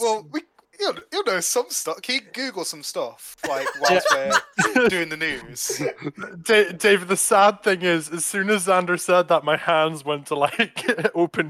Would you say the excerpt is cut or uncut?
uncut